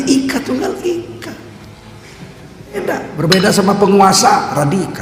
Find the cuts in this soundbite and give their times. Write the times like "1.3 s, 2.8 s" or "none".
2.8 s